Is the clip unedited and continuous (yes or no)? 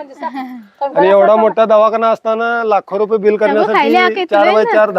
yes